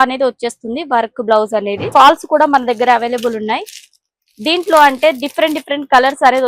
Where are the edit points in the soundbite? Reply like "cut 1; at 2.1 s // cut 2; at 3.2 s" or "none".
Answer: cut 1; at 1.9 s